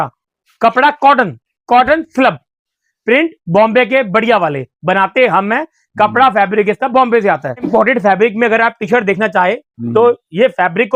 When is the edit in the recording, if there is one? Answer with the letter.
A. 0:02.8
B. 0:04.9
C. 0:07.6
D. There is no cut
C